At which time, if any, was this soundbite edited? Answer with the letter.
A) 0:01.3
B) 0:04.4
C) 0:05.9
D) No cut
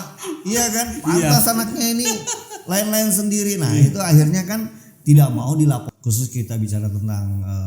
C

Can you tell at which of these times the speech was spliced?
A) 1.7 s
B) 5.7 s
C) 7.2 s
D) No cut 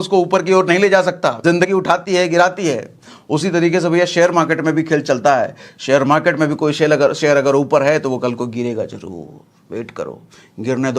A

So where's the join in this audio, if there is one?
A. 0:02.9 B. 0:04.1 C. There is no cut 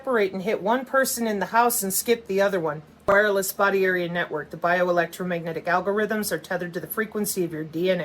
A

